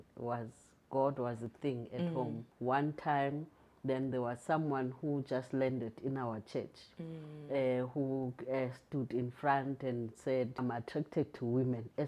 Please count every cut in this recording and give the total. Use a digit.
2